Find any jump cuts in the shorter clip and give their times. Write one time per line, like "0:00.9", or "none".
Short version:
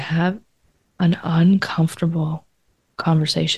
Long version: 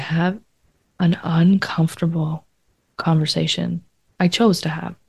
none